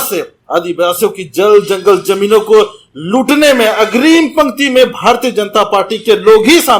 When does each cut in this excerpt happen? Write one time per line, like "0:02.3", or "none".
none